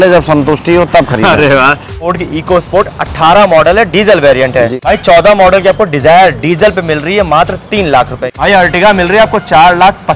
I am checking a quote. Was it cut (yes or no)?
yes